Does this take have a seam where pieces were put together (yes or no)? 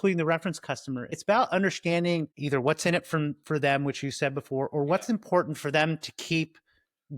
yes